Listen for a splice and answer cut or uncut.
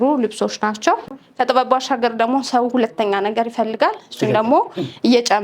cut